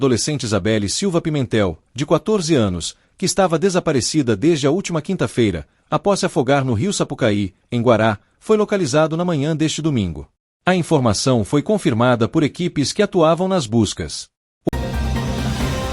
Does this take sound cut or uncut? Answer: cut